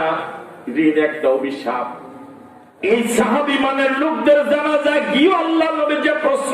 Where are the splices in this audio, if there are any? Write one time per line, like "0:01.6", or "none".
0:02.7